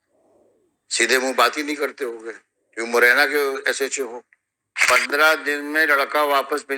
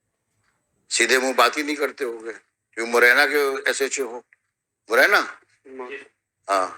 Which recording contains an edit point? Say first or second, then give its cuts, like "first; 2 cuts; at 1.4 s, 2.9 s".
first; 1 cut; at 4.9 s